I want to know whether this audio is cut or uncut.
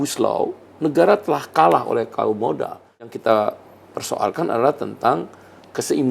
cut